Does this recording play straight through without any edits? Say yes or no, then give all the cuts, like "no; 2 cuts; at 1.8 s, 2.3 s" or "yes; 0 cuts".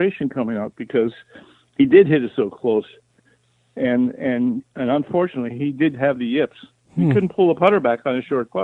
yes; 0 cuts